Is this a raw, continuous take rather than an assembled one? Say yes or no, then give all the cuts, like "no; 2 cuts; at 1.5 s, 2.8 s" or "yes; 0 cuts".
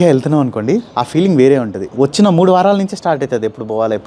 no; 2 cuts; at 0.9 s, 1.8 s